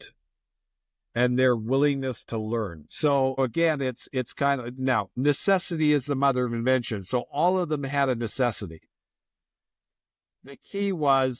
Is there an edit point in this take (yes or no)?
no